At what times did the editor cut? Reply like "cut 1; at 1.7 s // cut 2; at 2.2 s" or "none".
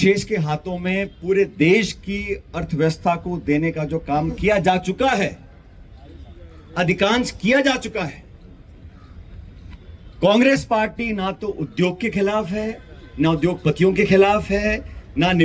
none